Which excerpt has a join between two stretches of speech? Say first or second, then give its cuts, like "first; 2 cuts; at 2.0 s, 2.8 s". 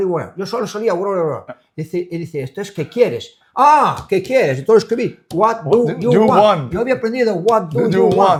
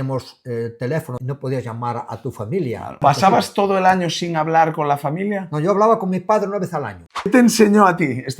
second; 3 cuts; at 1.1 s, 3.0 s, 7.3 s